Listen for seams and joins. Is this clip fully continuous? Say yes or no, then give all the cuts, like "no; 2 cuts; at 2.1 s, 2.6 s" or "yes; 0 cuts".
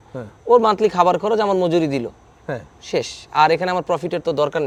yes; 0 cuts